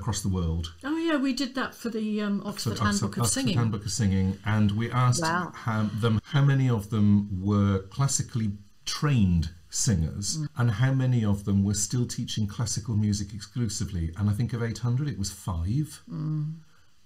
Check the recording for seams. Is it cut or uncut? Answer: cut